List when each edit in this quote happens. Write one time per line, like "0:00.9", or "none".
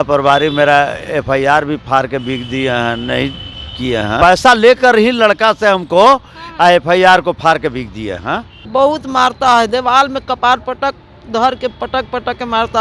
0:04.2
0:08.5